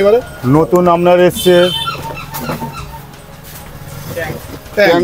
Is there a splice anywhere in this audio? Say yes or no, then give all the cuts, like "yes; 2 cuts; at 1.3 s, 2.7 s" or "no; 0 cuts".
no; 0 cuts